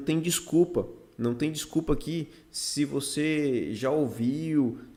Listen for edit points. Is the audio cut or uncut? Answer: uncut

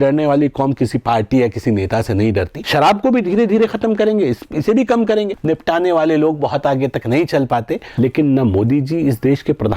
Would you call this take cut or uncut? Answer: cut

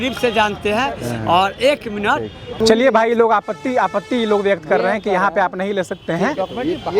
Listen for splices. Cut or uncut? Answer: cut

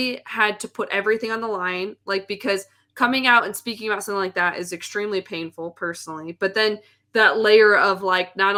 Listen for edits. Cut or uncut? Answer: uncut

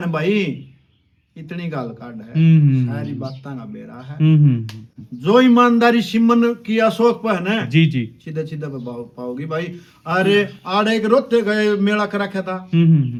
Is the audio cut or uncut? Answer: uncut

